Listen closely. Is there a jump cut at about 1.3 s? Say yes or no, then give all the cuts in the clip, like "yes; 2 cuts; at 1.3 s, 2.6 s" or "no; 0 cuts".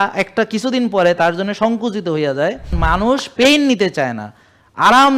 no; 1 cut; at 2.7 s